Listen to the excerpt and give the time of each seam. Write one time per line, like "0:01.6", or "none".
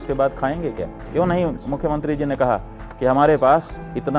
0:01.0